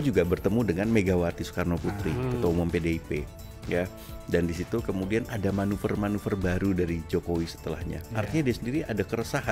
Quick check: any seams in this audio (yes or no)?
no